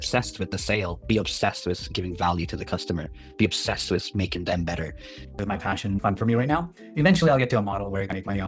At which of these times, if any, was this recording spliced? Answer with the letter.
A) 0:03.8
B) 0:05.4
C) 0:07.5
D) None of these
B